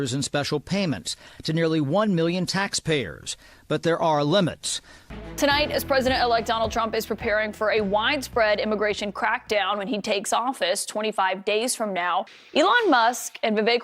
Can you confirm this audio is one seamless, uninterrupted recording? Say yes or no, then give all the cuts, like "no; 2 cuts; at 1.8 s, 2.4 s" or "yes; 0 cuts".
no; 2 cuts; at 5.2 s, 12.4 s